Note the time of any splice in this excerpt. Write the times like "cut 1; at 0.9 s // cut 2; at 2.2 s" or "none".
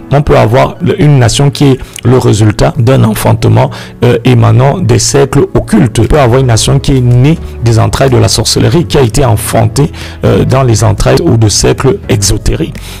cut 1; at 0.8 s // cut 2; at 2.8 s // cut 3; at 6.1 s // cut 4; at 11.2 s